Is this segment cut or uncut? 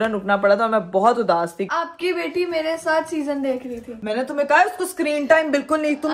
cut